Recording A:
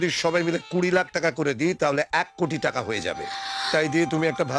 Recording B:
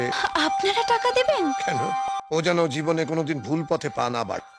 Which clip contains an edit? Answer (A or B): B